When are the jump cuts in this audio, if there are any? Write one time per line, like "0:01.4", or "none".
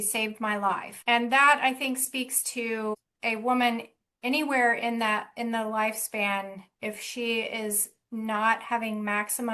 0:00.9
0:03.1